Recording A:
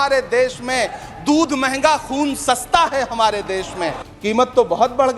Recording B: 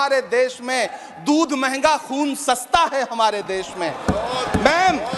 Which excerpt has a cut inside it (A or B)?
A